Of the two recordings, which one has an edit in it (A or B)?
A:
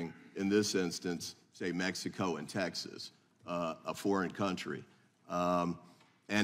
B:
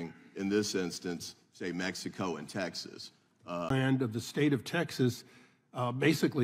A